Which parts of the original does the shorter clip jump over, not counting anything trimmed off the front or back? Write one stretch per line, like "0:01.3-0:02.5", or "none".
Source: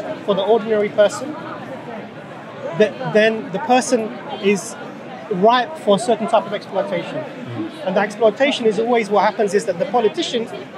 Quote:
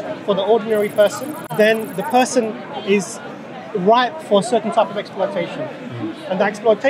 0:01.4-0:03.0